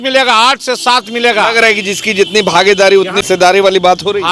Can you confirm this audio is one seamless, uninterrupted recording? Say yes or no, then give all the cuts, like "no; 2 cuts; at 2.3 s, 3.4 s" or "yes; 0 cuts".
no; 1 cut; at 3.2 s